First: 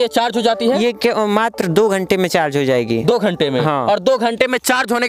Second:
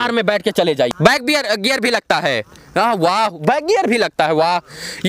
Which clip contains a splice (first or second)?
second